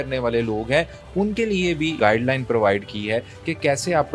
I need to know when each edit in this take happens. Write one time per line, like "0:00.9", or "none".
none